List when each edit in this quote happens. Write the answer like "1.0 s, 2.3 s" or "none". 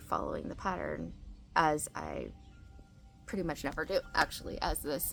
none